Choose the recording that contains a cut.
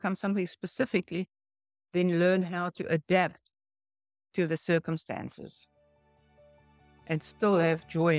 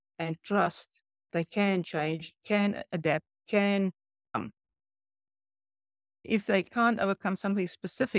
second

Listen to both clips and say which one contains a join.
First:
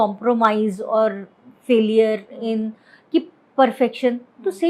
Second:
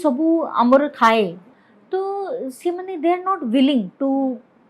second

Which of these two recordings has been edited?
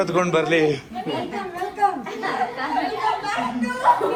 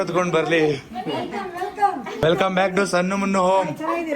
second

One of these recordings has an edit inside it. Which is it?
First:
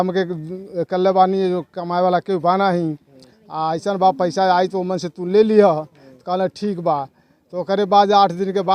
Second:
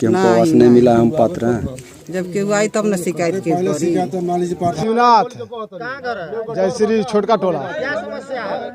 second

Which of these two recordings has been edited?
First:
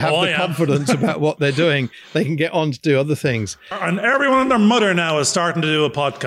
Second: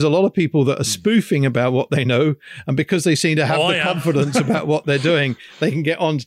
first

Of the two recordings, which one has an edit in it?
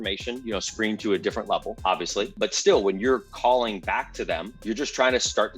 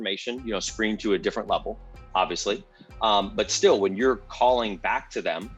first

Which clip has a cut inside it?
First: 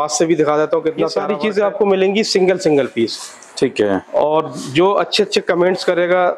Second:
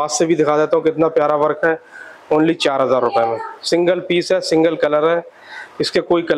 first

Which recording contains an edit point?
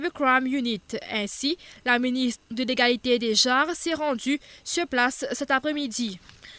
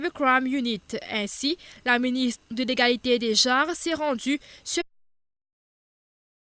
first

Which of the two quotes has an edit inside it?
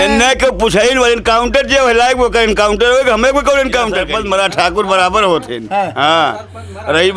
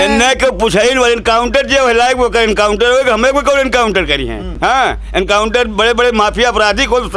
first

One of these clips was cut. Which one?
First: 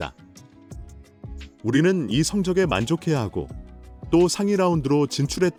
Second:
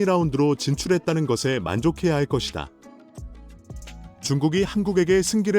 second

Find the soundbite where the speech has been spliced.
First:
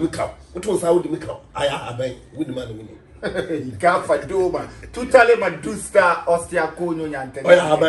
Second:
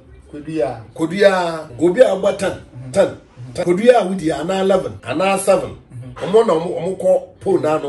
second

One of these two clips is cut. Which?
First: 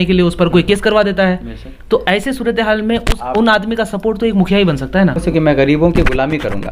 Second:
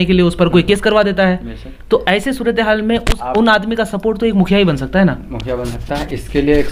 first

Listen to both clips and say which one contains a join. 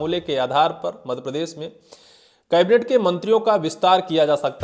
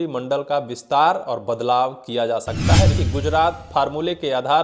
second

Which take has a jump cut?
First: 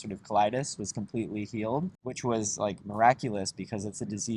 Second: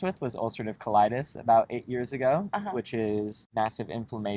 first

